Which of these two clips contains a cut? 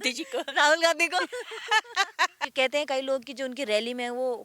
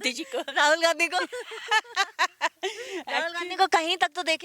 first; 1 cut; at 2.4 s

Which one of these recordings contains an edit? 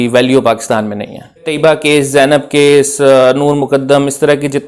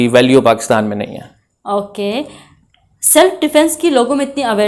first; 1 cut; at 1.5 s

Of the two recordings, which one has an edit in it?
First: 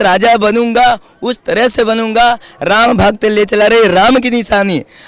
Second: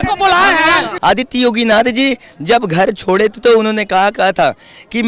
second; 1 cut; at 0.9 s

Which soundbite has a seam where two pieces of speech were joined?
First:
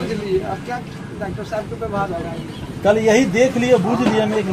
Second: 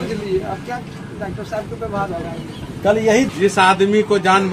second; 1 cut; at 3.3 s

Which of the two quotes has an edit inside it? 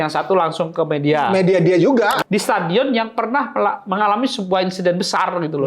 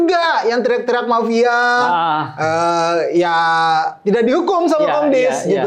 first; 1 cut; at 2.2 s

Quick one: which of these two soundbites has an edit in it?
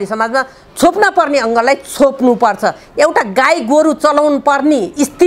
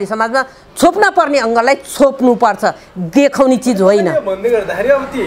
first; 1 cut; at 2.9 s

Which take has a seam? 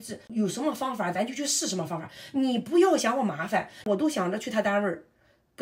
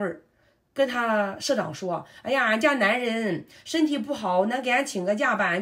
first; 1 cut; at 3.8 s

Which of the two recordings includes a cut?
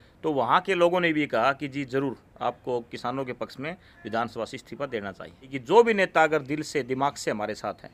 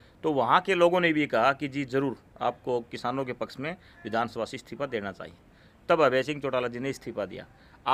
first; 1 cut; at 5.6 s

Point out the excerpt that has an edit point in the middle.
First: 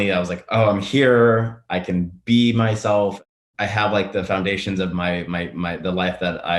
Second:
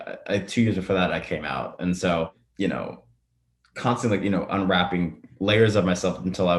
first; 1 cut; at 3.2 s

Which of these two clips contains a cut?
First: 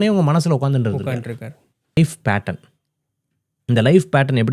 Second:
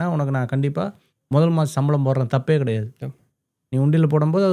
first; 1 cut; at 2.0 s

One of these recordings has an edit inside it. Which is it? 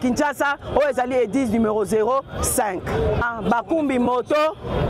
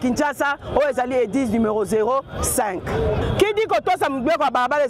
second; 1 cut; at 3.2 s

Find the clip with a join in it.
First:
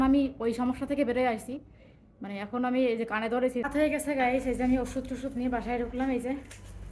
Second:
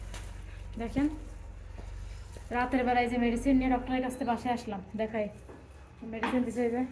first; 1 cut; at 3.6 s

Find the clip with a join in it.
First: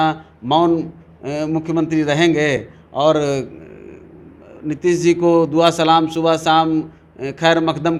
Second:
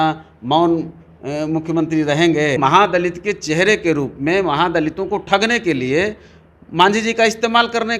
second; 1 cut; at 2.6 s

